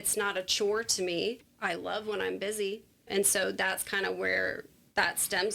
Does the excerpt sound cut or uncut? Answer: cut